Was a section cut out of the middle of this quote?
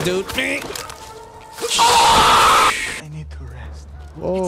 yes; 1 cut; at 2.9 s

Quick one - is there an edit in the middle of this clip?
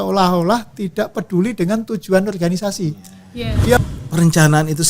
yes; 1 cut; at 3.8 s

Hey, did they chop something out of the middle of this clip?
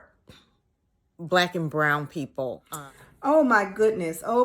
yes; 1 cut; at 2.7 s

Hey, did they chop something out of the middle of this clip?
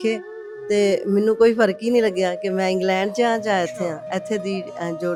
no; 0 cuts

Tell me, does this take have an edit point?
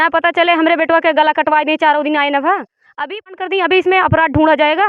yes; 1 cut; at 3.2 s

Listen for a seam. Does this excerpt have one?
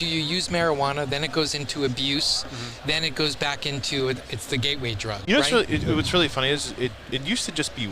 yes; 1 cut; at 5.2 s

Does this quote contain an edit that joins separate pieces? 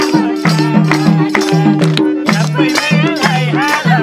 no; 0 cuts

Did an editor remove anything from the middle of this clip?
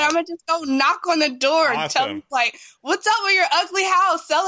yes; 1 cut; at 2.2 s

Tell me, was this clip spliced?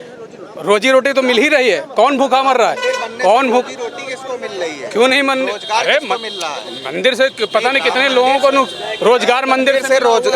no; 0 cuts

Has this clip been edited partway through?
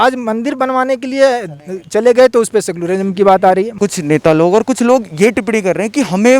yes; 1 cut; at 3.7 s

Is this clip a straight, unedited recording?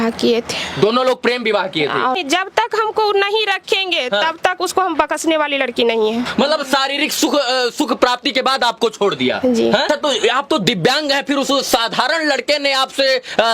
no; 3 cuts; at 2.2 s, 6.2 s, 9.8 s

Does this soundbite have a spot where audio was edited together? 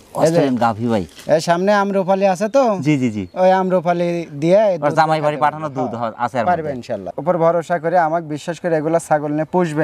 yes; 1 cut; at 7.2 s

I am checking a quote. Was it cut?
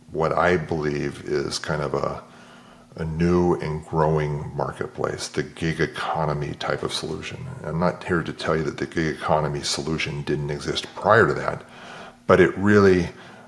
no; 0 cuts

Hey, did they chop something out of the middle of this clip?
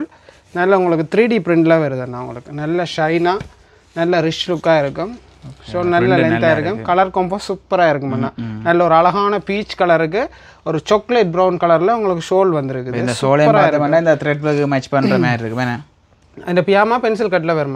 no; 0 cuts

